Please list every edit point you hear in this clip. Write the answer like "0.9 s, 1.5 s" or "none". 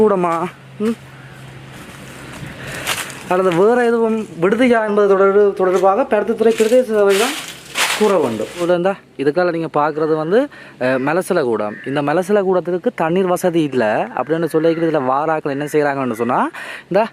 8.6 s